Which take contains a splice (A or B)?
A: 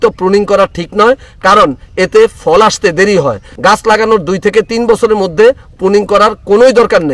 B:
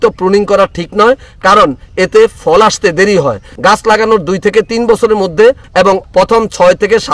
B